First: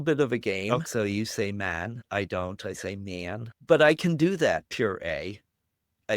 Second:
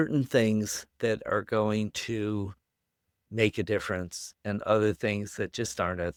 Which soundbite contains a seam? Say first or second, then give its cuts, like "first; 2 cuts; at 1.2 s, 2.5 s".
first; 3 cuts; at 0.9 s, 2.0 s, 3.5 s